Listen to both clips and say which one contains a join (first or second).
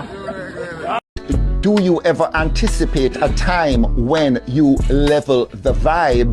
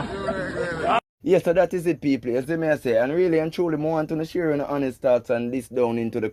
first